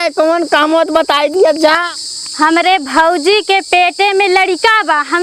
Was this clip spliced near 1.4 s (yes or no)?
no